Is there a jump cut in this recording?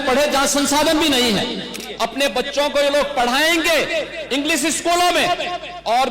yes; 1 cut; at 1.8 s

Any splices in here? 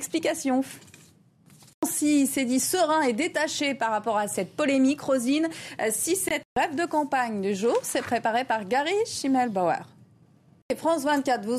yes; 2 cuts; at 1.9 s, 6.4 s

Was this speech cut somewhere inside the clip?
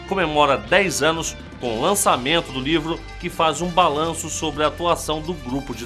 no; 0 cuts

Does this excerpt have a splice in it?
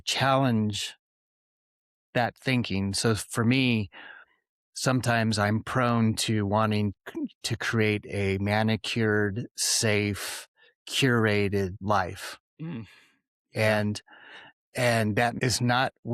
yes; 3 cuts; at 7.0 s, 11.8 s, 15.4 s

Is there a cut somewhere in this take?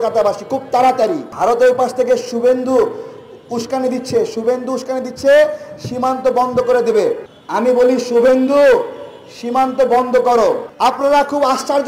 yes; 3 cuts; at 1.3 s, 7.3 s, 10.7 s

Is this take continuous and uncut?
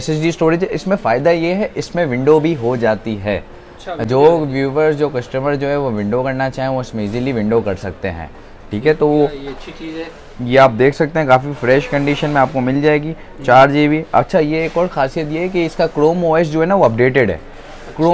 yes; 0 cuts

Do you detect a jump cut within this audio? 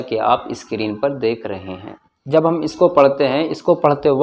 yes; 1 cut; at 2.1 s

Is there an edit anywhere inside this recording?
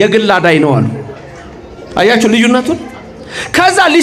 no; 0 cuts

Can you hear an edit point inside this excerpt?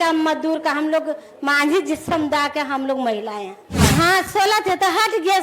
yes; 1 cut; at 3.9 s

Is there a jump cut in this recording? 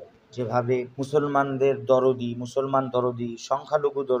yes; 1 cut; at 0.9 s

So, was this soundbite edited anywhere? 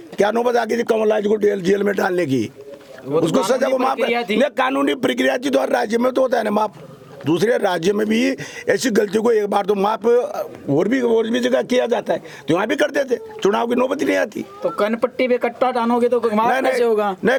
no; 0 cuts

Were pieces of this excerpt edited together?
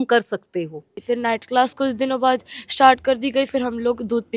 yes; 1 cut; at 1.0 s

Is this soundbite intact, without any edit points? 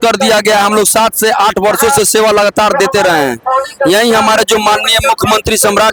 yes; 0 cuts

